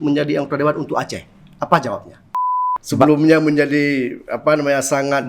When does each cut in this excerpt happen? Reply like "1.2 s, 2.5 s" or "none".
2.4 s